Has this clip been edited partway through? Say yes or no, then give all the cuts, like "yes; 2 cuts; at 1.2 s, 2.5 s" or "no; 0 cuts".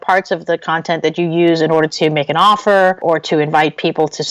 yes; 1 cut; at 3.0 s